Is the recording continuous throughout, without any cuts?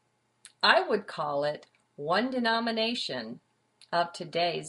yes; 0 cuts

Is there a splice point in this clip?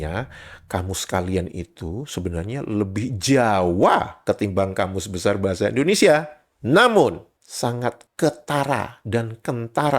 yes; 1 cut; at 7.3 s

